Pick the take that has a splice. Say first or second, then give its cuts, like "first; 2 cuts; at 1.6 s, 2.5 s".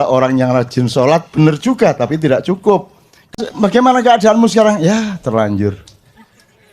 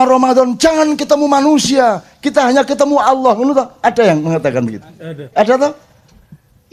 first; 1 cut; at 3.4 s